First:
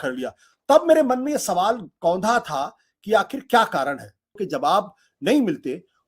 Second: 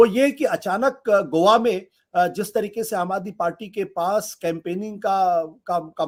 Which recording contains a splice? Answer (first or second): first